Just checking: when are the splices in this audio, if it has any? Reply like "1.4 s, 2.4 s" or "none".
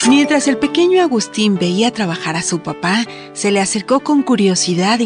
none

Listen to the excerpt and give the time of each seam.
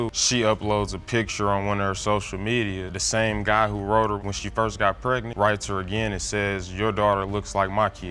none

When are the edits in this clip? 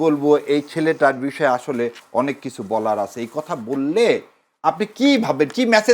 none

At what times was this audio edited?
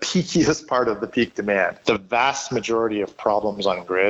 1.8 s

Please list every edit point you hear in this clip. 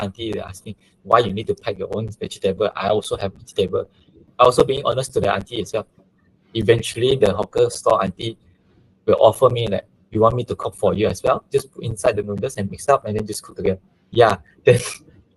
4.3 s, 6.1 s

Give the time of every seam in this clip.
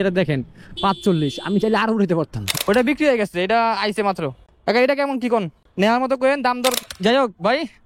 2.6 s, 6.9 s

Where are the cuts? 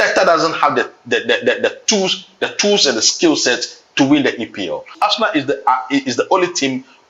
4.9 s

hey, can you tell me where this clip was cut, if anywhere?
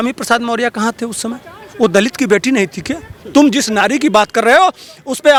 none

